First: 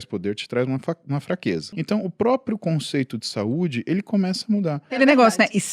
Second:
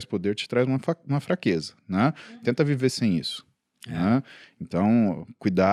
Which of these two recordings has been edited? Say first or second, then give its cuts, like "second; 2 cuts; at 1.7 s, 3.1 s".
first; 2 cuts; at 1.7 s, 5.0 s